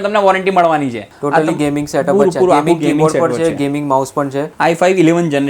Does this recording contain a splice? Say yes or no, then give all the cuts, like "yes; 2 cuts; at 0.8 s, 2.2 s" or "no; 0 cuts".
yes; 2 cuts; at 1.1 s, 4.5 s